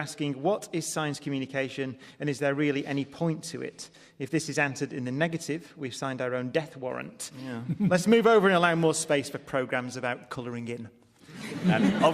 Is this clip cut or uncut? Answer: cut